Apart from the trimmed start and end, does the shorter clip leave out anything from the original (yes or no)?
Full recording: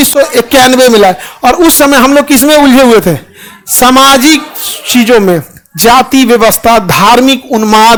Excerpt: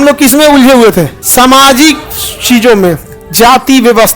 yes